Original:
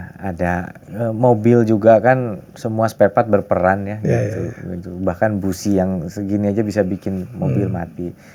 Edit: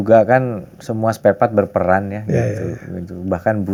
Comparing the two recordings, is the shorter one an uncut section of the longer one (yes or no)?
yes